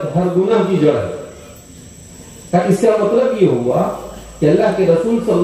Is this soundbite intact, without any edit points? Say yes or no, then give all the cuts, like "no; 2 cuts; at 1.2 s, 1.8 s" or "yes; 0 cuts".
yes; 0 cuts